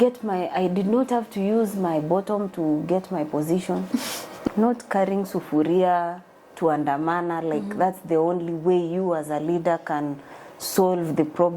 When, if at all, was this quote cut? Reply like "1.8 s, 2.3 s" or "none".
4.4 s

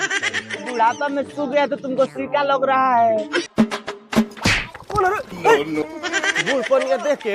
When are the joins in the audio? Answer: 3.5 s, 5.8 s

